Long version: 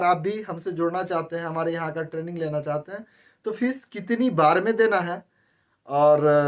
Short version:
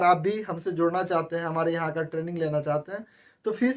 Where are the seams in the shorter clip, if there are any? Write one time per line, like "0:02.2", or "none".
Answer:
none